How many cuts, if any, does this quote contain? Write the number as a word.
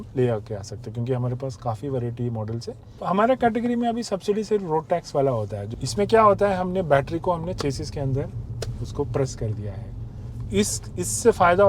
two